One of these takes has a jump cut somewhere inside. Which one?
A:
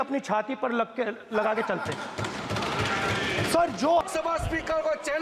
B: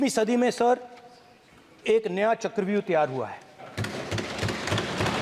A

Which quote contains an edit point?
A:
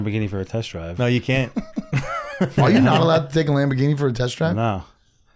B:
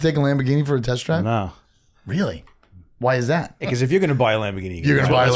B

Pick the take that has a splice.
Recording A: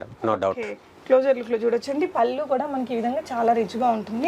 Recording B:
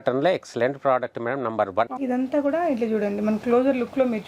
B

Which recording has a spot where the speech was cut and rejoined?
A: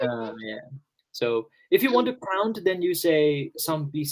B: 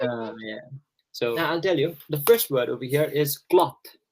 B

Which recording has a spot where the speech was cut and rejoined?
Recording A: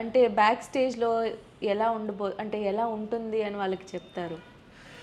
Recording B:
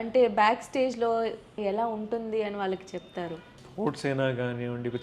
B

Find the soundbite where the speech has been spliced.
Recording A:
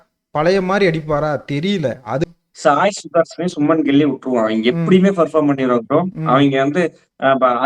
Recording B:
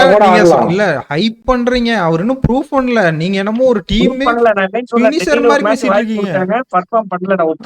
A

